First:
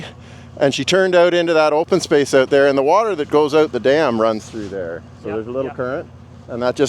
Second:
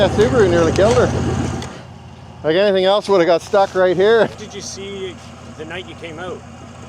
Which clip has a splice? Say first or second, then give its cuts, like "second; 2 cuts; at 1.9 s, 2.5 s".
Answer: second; 1 cut; at 4.4 s